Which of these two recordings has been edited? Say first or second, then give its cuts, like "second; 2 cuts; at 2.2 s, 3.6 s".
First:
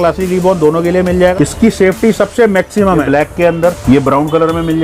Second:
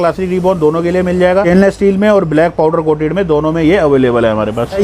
first; 2 cuts; at 1.3 s, 3.1 s